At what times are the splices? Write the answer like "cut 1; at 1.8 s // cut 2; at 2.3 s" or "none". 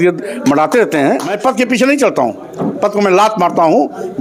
cut 1; at 1.3 s

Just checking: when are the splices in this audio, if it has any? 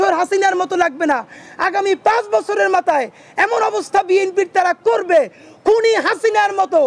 none

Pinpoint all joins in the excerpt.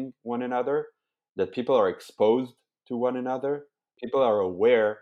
cut 1; at 3.9 s

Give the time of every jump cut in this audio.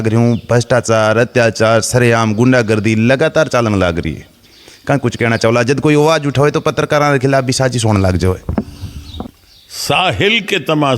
cut 1; at 9.3 s

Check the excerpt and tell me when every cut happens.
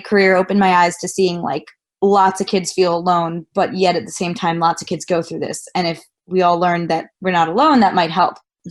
none

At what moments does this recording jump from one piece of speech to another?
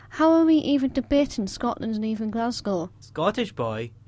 cut 1; at 3.0 s

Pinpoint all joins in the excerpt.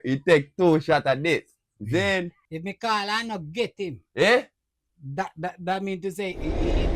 cut 1; at 2.4 s

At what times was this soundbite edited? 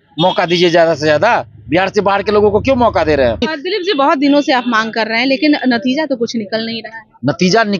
cut 1; at 3.7 s

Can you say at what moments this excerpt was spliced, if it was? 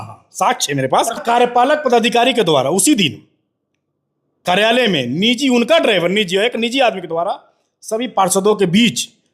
cut 1; at 1.2 s

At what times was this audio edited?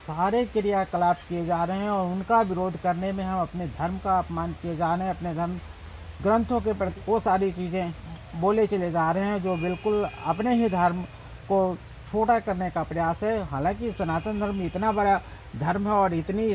none

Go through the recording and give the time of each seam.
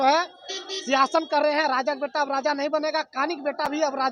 none

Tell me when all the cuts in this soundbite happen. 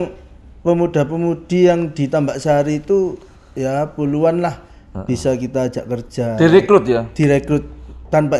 none

